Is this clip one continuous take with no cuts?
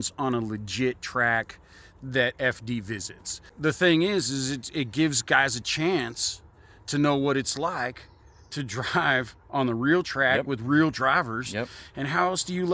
no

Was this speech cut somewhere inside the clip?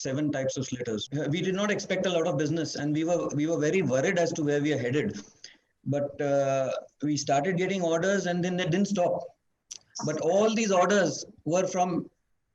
yes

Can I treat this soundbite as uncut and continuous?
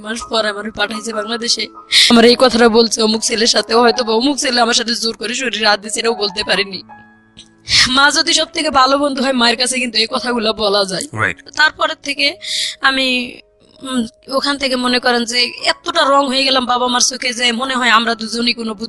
no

